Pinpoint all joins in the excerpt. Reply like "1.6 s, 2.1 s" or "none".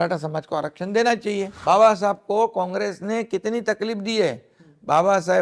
1.5 s

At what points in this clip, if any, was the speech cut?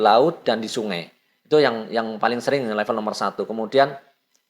none

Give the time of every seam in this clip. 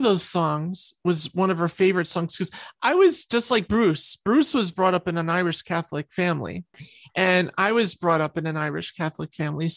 6.8 s

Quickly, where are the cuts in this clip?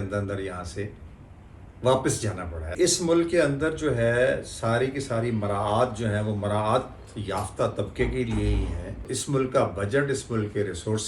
2.7 s, 9.1 s

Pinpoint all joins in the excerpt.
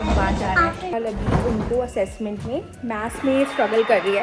0.9 s

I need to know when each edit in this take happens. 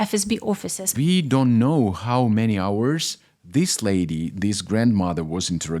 1.0 s

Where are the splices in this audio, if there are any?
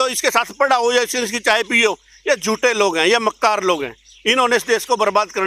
none

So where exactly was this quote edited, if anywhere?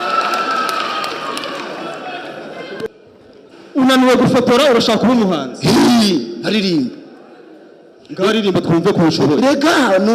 2.9 s

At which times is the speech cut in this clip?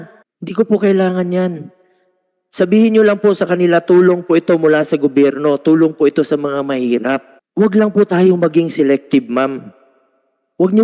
none

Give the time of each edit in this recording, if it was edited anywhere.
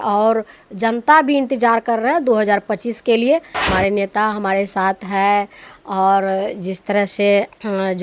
3.7 s

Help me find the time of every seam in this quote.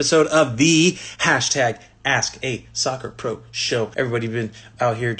3.9 s

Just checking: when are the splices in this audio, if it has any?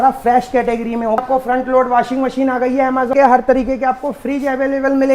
1.2 s, 3.1 s

